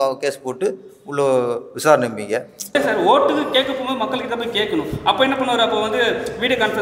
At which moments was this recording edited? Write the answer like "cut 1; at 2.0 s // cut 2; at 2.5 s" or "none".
cut 1; at 2.7 s